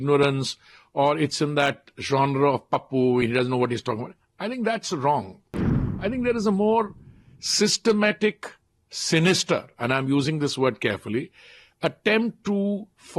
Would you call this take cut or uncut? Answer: uncut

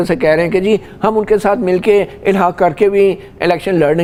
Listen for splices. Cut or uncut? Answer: uncut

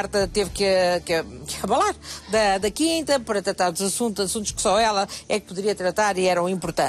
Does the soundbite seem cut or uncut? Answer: uncut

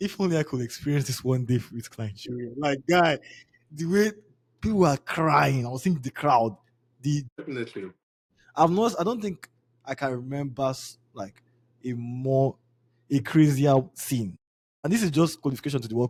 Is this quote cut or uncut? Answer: uncut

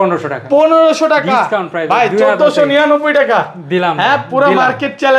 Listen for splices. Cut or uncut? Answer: uncut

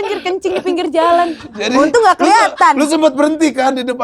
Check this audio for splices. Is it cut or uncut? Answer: uncut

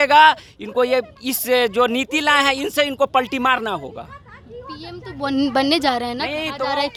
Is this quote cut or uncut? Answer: uncut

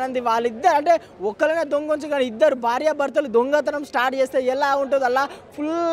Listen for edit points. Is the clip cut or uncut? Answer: uncut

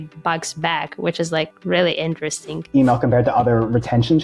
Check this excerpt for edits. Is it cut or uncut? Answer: cut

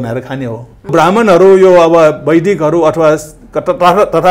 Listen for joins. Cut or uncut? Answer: cut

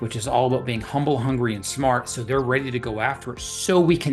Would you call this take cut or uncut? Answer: uncut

